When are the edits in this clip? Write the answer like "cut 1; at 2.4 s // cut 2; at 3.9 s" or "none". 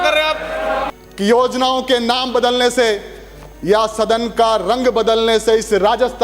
cut 1; at 0.9 s